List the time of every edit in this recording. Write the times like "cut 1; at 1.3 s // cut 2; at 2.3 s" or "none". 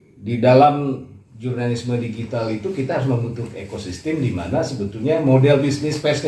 none

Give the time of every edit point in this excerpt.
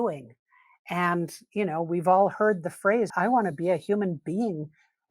cut 1; at 3.1 s

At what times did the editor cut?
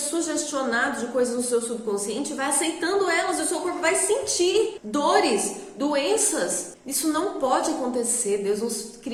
none

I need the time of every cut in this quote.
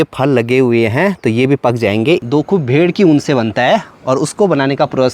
cut 1; at 2.2 s

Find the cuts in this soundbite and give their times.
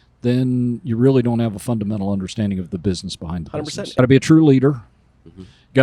cut 1; at 4.0 s

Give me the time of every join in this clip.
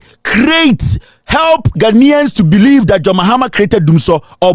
none

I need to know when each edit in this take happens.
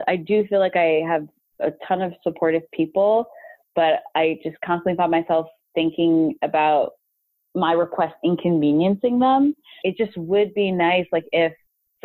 cut 1; at 9.8 s

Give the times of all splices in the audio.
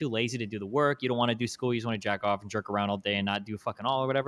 none

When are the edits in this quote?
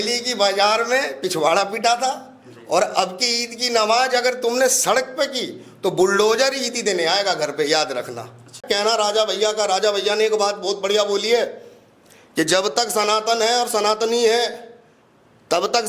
cut 1; at 8.6 s

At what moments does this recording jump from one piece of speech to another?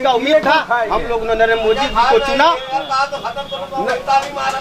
none

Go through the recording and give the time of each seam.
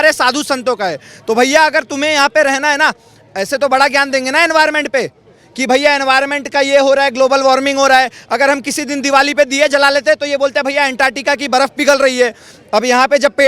none

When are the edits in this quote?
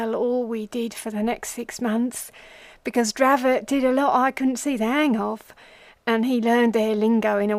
none

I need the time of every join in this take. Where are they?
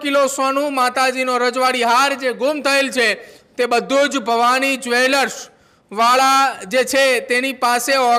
none

